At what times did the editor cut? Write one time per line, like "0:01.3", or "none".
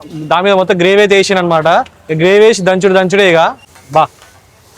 0:03.7